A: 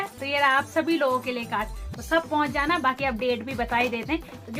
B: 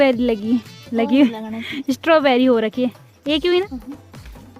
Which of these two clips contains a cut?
B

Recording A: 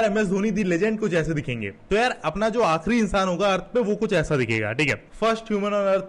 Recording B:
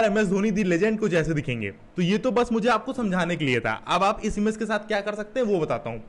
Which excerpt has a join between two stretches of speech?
A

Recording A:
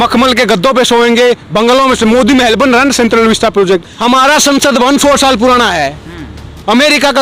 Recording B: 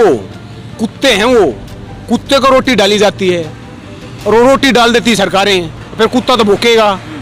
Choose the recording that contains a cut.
A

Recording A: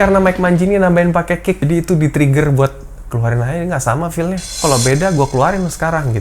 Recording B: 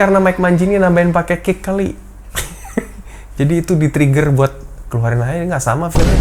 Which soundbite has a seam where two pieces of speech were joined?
A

